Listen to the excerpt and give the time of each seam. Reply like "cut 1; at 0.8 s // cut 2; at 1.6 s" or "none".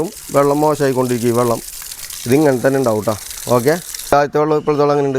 cut 1; at 4.1 s

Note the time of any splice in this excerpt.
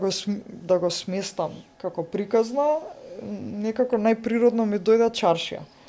none

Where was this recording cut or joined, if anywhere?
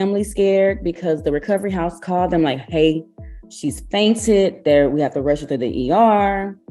cut 1; at 4.6 s

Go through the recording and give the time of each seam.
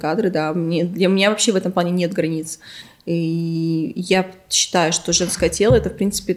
none

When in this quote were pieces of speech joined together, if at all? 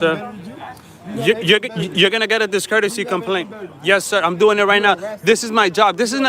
none

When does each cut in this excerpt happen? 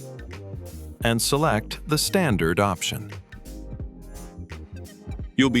cut 1; at 1.0 s

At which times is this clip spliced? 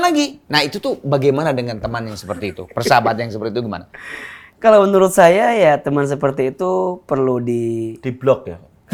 none

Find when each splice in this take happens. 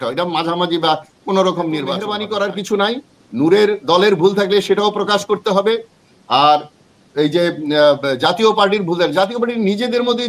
cut 1; at 2.1 s

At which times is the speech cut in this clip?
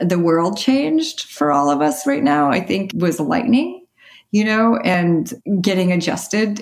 cut 1; at 1.3 s // cut 2; at 2.9 s // cut 3; at 5.1 s

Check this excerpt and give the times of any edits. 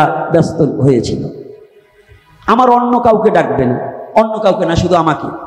none

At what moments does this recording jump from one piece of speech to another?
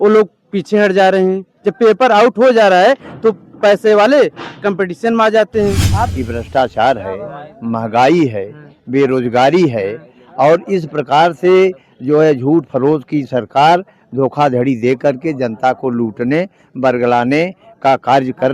cut 1; at 6.1 s

